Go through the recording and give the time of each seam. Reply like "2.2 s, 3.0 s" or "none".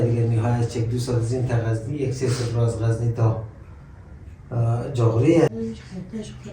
5.5 s